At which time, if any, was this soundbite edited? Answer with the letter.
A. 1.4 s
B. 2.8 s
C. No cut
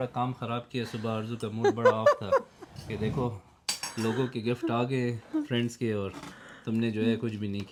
C